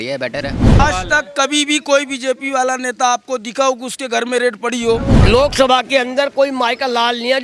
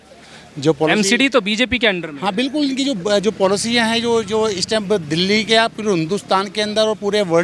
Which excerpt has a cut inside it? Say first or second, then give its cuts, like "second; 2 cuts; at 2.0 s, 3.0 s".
first; 2 cuts; at 0.8 s, 5.2 s